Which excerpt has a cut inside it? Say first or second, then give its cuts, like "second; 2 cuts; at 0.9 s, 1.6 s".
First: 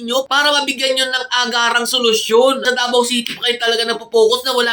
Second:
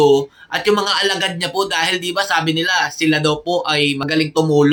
first; 1 cut; at 2.6 s